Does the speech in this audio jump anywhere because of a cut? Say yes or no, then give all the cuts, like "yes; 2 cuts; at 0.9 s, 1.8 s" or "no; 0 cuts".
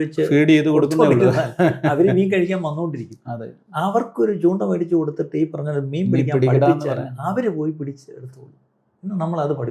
no; 0 cuts